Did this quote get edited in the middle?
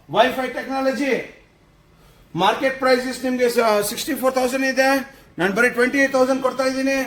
no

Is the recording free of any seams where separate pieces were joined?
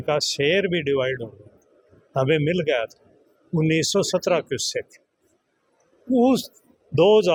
yes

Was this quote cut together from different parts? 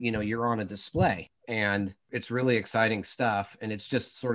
yes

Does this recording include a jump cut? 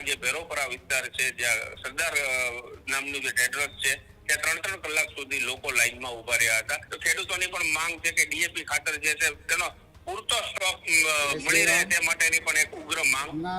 yes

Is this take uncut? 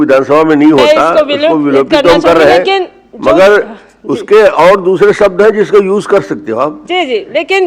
yes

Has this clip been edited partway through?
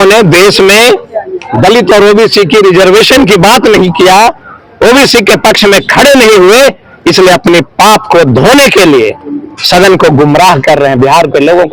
no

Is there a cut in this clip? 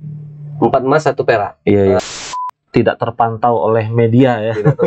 yes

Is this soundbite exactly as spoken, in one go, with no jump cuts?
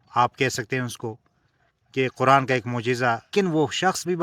no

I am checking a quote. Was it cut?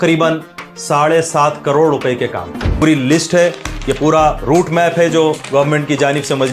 yes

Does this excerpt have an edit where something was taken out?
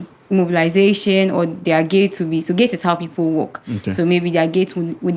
no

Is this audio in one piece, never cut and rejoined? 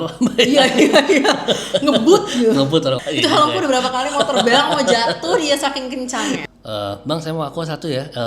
no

